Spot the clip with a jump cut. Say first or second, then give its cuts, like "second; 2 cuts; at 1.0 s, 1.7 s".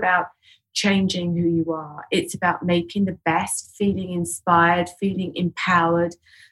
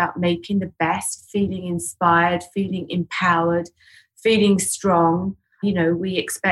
second; 1 cut; at 5.6 s